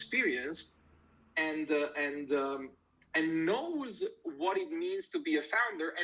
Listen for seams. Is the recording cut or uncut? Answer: uncut